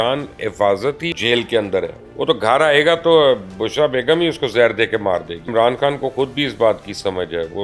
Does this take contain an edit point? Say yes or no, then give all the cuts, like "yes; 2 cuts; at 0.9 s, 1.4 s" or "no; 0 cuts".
yes; 3 cuts; at 1.1 s, 2.0 s, 5.5 s